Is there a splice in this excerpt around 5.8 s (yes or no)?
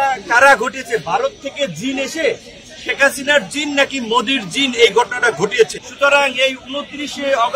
yes